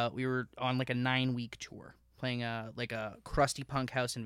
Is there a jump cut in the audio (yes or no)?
yes